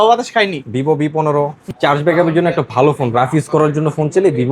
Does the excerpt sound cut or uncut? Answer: cut